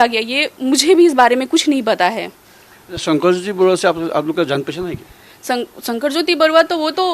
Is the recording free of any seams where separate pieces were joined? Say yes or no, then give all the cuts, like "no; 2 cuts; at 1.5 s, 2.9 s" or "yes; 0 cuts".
yes; 0 cuts